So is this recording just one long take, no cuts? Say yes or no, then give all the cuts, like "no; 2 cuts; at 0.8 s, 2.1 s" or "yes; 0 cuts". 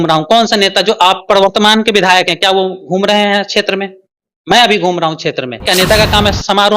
no; 1 cut; at 5.7 s